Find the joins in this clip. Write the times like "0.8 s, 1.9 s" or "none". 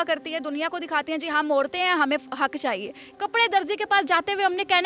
3.0 s